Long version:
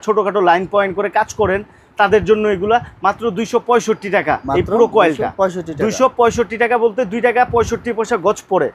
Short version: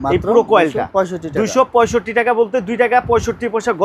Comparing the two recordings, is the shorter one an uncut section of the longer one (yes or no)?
yes